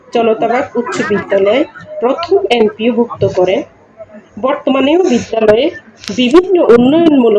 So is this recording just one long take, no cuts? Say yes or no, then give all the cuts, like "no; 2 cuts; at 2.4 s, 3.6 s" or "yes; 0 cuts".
yes; 0 cuts